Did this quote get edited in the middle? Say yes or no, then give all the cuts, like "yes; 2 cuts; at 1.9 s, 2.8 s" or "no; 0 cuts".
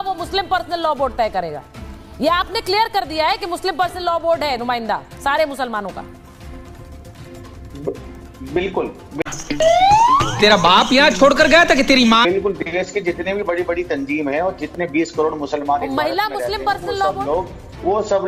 no; 0 cuts